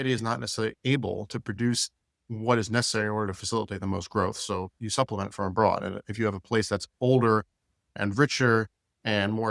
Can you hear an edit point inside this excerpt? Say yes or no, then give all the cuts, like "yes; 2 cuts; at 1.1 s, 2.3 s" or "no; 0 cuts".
yes; 3 cuts; at 0.8 s, 2.2 s, 8.0 s